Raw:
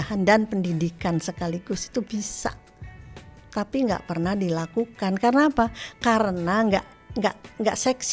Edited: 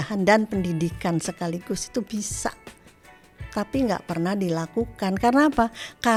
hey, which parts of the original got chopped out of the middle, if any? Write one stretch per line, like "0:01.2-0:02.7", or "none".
none